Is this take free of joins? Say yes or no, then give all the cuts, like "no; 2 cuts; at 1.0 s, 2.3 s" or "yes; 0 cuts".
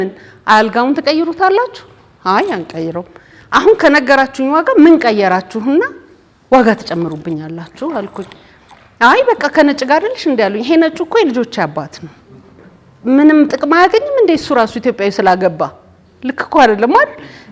yes; 0 cuts